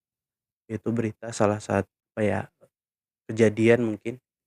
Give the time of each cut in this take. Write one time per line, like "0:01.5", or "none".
0:01.9